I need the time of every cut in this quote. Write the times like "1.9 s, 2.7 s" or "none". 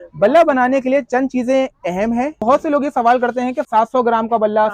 2.4 s, 3.6 s